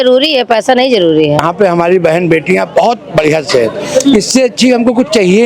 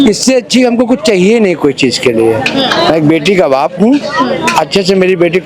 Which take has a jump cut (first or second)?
first